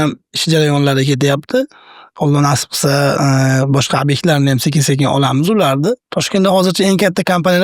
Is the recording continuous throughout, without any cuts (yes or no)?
yes